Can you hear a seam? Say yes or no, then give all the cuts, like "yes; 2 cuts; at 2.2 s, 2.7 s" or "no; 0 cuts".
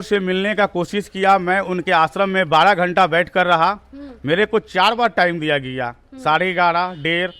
no; 0 cuts